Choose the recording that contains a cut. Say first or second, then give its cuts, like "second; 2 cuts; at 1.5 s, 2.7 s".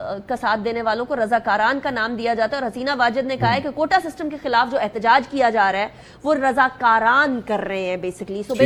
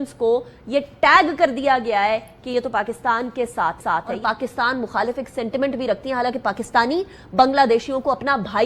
second; 1 cut; at 4.2 s